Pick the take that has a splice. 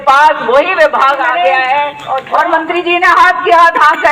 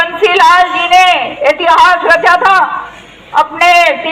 first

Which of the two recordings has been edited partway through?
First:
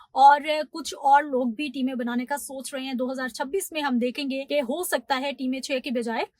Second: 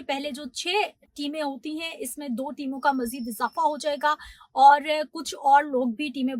first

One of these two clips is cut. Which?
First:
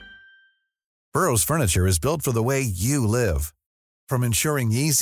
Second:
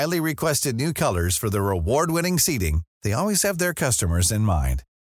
first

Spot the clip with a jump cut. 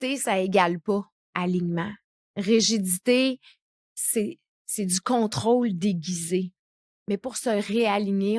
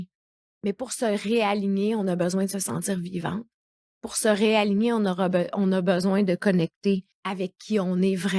second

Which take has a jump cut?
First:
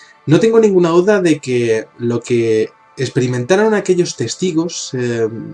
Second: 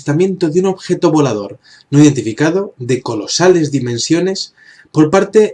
first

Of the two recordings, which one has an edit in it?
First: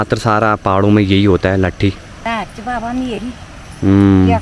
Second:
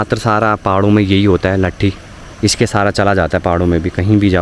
first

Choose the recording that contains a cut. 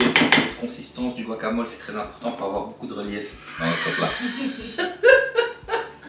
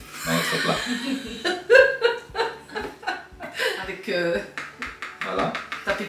second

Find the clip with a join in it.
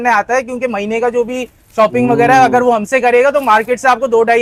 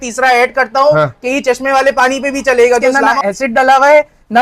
second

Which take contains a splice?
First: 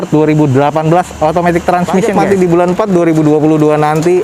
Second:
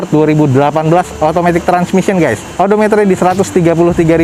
first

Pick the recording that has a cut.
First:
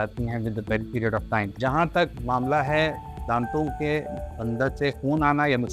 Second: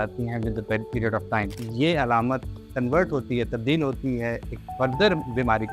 second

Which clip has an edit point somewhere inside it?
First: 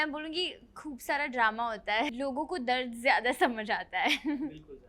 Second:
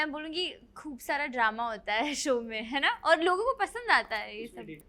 first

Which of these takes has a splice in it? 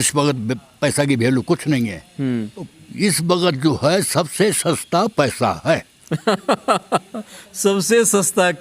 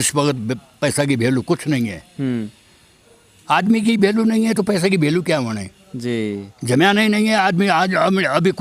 first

